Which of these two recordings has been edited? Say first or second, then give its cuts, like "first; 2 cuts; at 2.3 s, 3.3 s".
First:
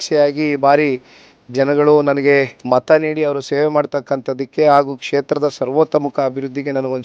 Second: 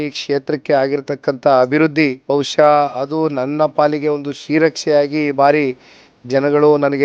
second; 1 cut; at 2.2 s